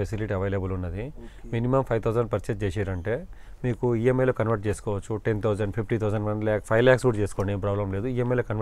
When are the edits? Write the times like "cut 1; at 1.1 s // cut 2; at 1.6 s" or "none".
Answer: none